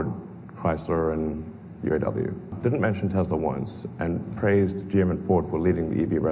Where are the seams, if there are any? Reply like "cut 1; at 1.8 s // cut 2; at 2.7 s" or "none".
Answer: cut 1; at 2.6 s

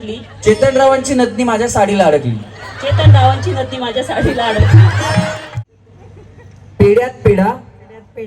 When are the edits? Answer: cut 1; at 5.4 s

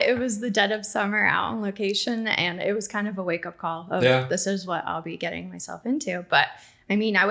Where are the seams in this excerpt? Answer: none

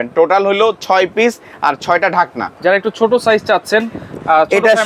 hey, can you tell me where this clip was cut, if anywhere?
cut 1; at 2.5 s

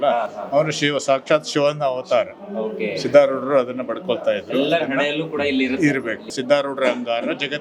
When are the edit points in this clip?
cut 1; at 6.3 s

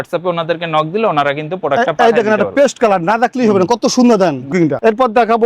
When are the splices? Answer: cut 1; at 4.5 s

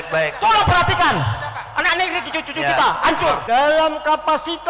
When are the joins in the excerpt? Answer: cut 1; at 3.4 s

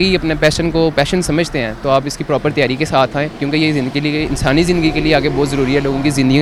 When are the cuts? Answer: none

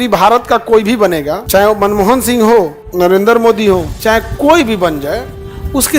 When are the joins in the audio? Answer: cut 1; at 1.4 s // cut 2; at 2.8 s // cut 3; at 3.9 s

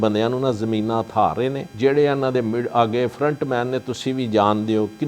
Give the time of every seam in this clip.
cut 1; at 1.7 s

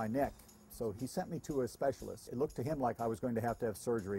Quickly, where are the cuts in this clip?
cut 1; at 0.9 s // cut 2; at 2.3 s

